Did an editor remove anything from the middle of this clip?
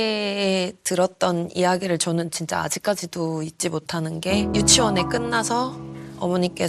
yes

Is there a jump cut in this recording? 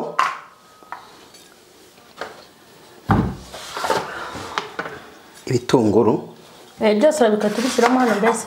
no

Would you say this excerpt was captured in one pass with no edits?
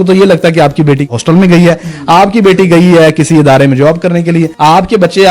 no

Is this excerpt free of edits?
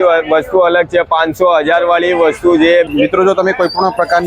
no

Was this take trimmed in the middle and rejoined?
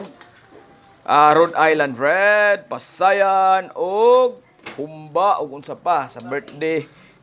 no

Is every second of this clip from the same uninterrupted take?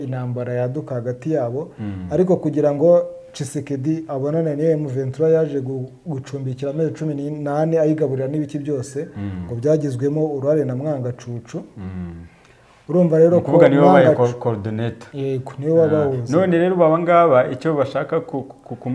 yes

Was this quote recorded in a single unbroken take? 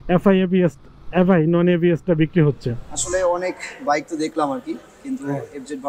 no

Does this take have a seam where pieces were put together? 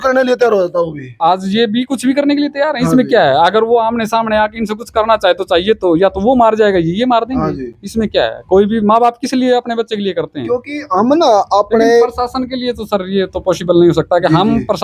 no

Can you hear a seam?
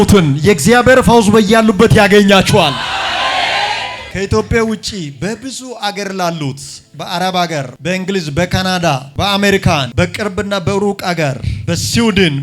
yes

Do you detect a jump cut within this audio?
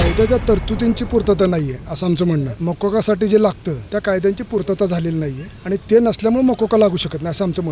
yes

